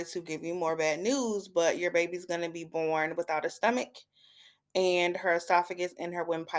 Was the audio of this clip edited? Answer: no; 0 cuts

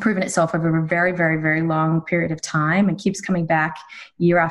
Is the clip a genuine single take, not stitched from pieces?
yes; 0 cuts

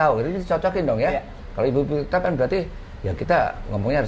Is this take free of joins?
yes; 0 cuts

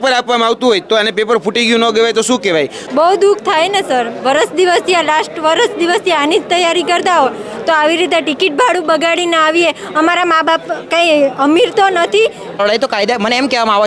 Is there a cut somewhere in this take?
yes; 2 cuts; at 2.8 s, 12.6 s

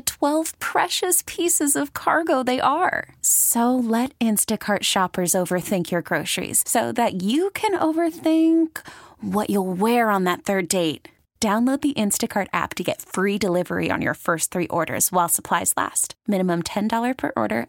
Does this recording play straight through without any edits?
yes; 0 cuts

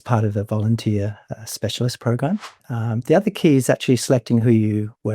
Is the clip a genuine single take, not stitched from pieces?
no; 1 cut; at 2.6 s

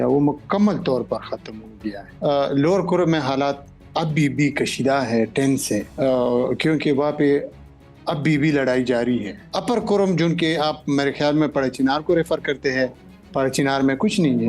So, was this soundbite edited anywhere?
no; 0 cuts

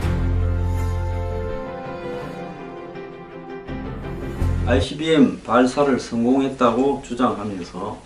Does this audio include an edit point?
no; 0 cuts

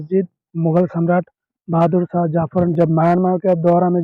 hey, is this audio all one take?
no; 1 cut; at 2.7 s

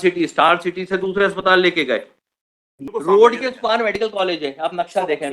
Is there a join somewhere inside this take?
yes; 1 cut; at 2.8 s

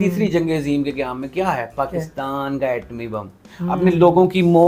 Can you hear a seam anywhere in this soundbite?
yes; 1 cut; at 3.4 s

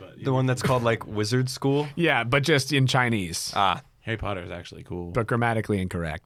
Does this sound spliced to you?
no; 0 cuts

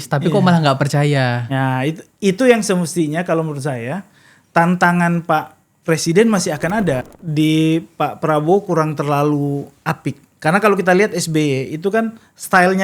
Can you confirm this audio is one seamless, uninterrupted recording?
no; 1 cut; at 7.2 s

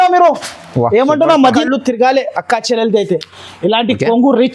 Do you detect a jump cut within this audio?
yes; 1 cut; at 1.6 s

